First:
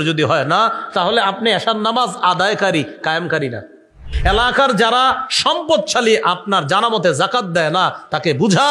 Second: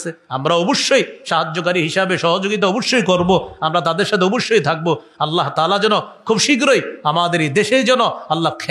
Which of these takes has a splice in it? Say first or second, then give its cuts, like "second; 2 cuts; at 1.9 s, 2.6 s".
first; 1 cut; at 4.1 s